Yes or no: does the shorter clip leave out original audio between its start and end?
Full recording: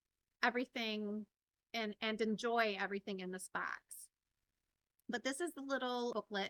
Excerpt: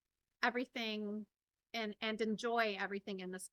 no